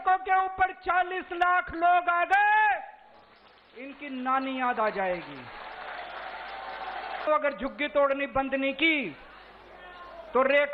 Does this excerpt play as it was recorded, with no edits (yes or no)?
no